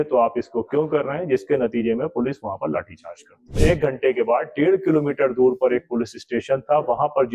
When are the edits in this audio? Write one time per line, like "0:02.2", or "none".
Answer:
0:03.6